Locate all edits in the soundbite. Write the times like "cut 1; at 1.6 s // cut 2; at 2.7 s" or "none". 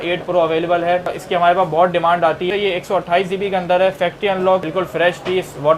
cut 1; at 1.2 s // cut 2; at 2.5 s // cut 3; at 4.6 s